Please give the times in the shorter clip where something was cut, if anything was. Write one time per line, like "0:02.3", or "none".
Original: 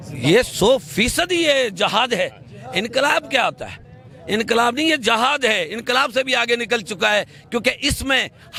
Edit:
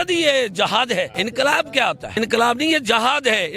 0:01.1
0:02.1